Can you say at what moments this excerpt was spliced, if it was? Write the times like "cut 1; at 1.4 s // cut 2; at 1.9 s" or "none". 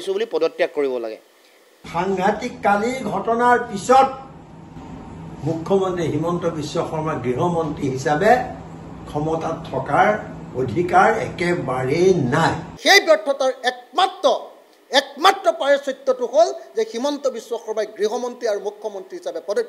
cut 1; at 1.7 s // cut 2; at 12.7 s

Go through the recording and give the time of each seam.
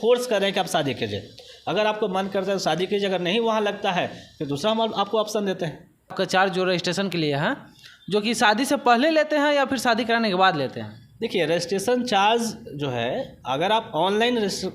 cut 1; at 6.1 s

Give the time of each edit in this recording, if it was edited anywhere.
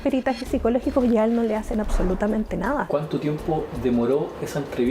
cut 1; at 2.9 s

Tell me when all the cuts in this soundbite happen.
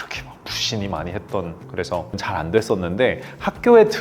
cut 1; at 1.7 s

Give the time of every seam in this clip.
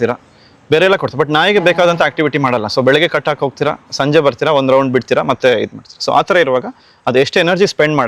none

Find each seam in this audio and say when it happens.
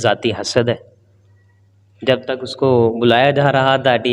none

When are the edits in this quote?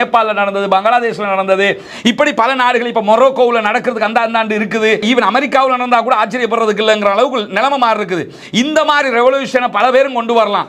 cut 1; at 5.0 s

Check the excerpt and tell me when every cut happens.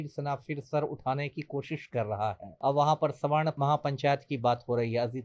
cut 1; at 2.5 s // cut 2; at 3.6 s

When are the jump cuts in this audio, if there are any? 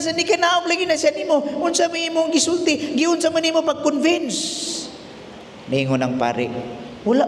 none

